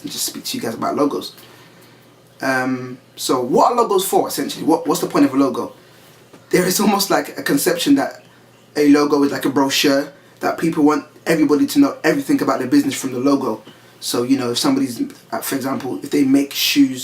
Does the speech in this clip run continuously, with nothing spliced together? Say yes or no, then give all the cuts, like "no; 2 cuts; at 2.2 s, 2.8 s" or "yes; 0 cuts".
no; 1 cut; at 5.5 s